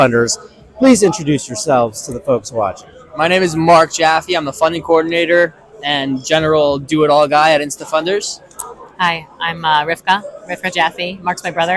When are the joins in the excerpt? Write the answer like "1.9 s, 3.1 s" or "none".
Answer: none